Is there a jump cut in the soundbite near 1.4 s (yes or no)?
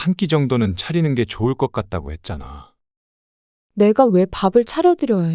no